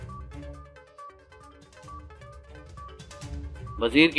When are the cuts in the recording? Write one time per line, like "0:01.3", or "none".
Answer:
0:02.7